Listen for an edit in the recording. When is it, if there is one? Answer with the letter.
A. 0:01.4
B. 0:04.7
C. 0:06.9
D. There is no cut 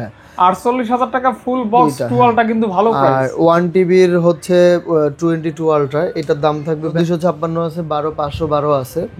C